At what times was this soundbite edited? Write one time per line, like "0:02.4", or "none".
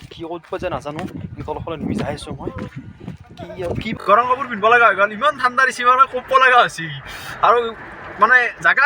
0:04.0